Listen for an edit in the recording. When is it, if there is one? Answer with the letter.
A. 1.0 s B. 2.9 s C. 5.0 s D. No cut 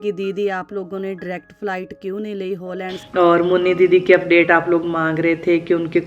B